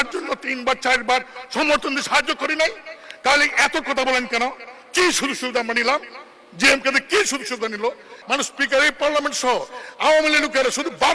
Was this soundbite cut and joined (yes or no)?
yes